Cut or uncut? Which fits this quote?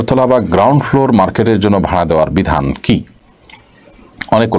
uncut